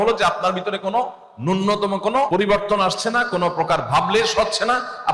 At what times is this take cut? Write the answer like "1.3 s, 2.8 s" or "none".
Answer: 2.3 s

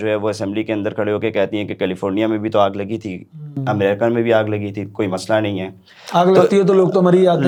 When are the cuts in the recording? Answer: none

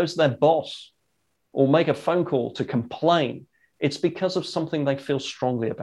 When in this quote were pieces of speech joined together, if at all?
none

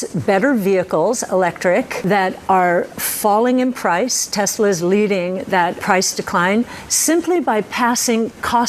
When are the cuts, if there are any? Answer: 2.0 s, 5.8 s

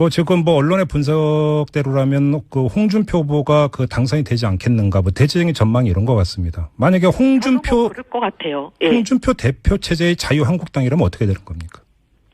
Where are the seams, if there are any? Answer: 7.8 s

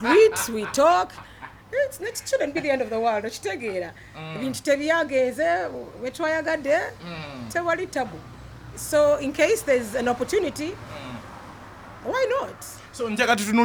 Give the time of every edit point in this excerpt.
none

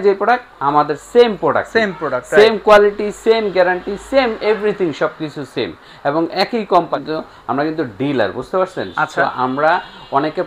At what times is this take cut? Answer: 7.0 s

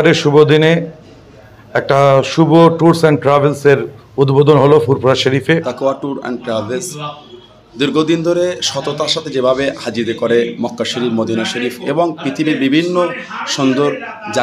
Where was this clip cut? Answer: 5.7 s

